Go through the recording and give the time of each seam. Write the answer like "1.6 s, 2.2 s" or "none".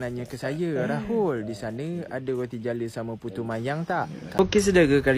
4.1 s